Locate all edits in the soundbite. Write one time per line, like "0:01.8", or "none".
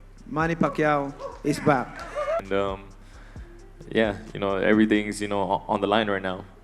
0:02.4